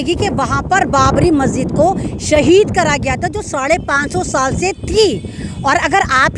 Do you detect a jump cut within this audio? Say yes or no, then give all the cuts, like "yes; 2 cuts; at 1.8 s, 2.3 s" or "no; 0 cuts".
no; 0 cuts